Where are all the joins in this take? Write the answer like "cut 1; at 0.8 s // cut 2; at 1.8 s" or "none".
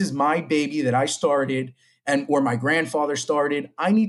none